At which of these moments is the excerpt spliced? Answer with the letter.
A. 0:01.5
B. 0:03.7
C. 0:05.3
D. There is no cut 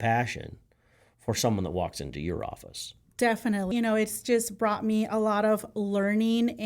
B